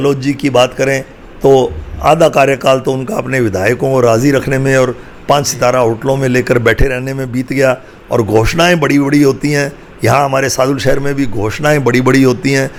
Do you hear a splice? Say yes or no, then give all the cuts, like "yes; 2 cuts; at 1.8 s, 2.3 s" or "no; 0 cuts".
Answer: no; 0 cuts